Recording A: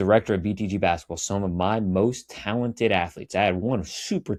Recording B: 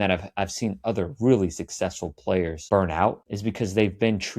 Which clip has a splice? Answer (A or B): B